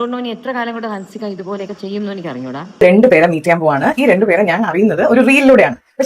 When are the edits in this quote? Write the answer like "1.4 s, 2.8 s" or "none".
2.6 s